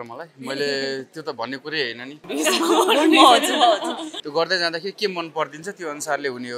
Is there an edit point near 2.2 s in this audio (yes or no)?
yes